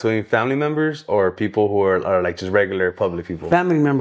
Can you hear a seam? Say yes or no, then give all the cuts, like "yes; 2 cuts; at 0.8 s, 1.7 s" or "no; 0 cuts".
no; 0 cuts